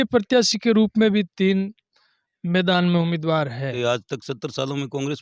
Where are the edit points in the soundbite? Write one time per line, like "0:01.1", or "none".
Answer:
0:03.7